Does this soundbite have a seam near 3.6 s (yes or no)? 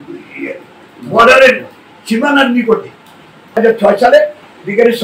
yes